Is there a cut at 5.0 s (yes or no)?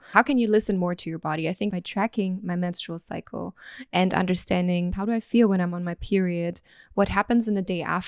yes